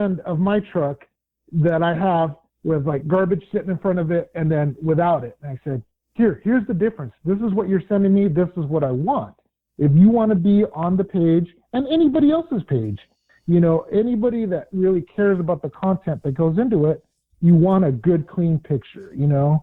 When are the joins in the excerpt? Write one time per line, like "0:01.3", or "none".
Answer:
none